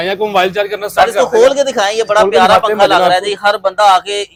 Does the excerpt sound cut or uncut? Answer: uncut